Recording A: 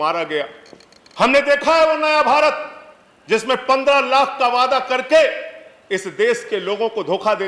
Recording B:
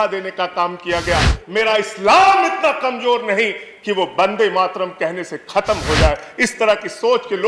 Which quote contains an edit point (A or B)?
B